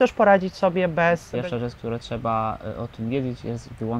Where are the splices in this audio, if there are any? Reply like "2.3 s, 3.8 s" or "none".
1.3 s